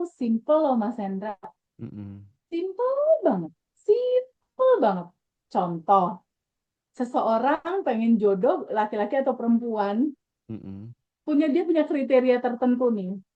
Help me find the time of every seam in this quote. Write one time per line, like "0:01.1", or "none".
none